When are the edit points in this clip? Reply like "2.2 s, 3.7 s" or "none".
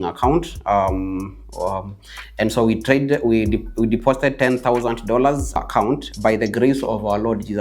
5.6 s